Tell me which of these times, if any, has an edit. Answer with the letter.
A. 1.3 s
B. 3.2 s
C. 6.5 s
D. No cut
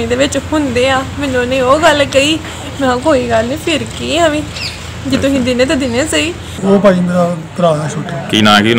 C